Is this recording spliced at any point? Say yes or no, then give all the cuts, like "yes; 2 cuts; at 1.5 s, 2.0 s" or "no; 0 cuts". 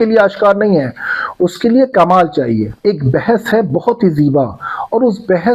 no; 0 cuts